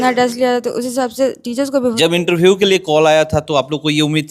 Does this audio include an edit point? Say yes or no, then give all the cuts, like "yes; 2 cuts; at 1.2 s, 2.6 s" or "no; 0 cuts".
yes; 1 cut; at 1.9 s